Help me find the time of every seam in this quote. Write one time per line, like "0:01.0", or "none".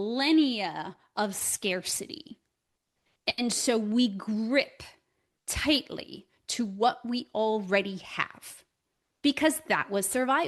none